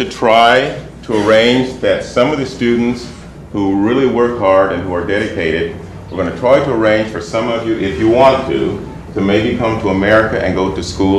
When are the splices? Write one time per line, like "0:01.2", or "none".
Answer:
0:03.0